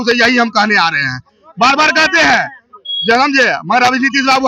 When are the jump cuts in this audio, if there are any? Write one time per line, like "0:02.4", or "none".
none